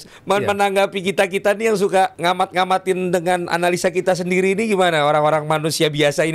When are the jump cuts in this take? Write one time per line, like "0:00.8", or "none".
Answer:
0:02.2